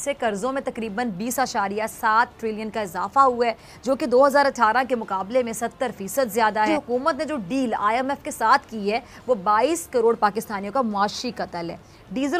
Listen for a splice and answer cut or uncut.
cut